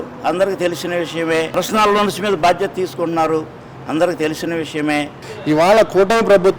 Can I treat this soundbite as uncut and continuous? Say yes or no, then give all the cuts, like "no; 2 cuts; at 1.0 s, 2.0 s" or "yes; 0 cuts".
no; 2 cuts; at 1.6 s, 5.3 s